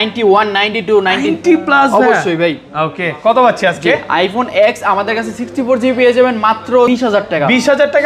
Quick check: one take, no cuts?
no; 1 cut; at 6.9 s

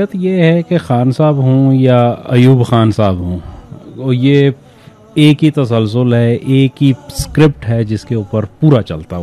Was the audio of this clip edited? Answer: no; 0 cuts

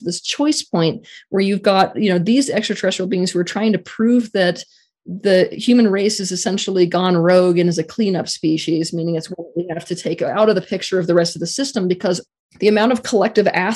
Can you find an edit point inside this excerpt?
yes; 1 cut; at 12.3 s

